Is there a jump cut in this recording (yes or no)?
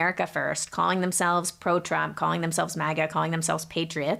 no